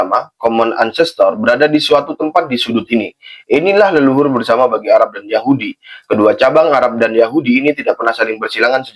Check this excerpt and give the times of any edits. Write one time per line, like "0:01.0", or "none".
none